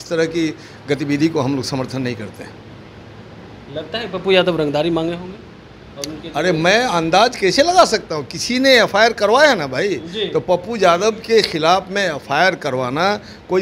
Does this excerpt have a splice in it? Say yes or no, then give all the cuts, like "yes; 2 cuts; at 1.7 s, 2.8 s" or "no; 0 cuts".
no; 0 cuts